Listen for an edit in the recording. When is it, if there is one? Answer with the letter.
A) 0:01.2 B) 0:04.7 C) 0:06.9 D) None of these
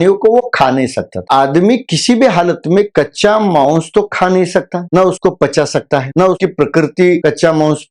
A